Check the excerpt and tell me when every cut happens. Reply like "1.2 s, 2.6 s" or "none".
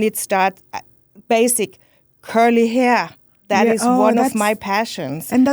none